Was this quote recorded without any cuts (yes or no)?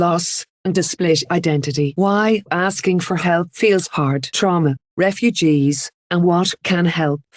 no